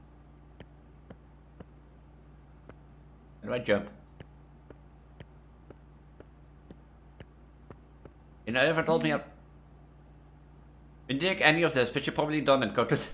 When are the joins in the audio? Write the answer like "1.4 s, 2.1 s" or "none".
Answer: none